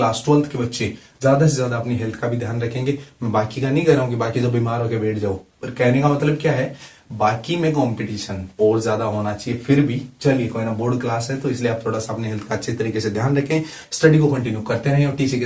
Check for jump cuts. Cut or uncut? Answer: uncut